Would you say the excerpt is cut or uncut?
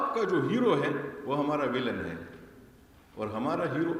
uncut